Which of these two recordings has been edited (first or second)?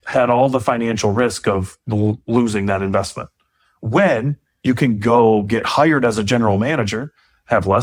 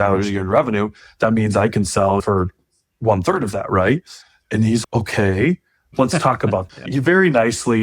second